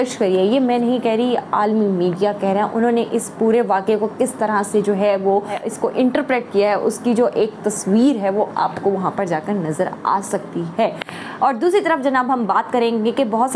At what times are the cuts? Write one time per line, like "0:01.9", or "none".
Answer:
0:05.5